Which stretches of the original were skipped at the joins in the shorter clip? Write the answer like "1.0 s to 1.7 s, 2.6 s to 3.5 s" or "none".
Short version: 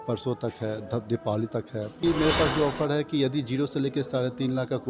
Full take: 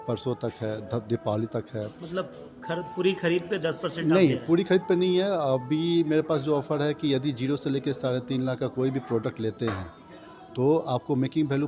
2.0 s to 5.9 s